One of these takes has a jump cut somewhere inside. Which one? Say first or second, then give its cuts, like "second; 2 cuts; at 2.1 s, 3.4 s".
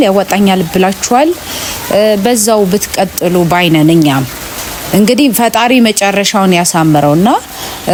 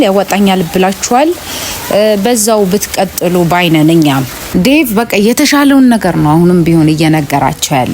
second; 1 cut; at 4.4 s